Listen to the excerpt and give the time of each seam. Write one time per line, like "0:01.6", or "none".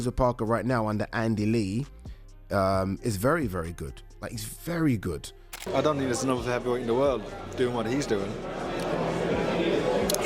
0:05.6